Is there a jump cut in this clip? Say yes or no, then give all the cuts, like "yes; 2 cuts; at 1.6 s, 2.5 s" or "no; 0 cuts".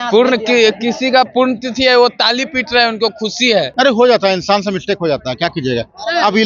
yes; 1 cut; at 3.7 s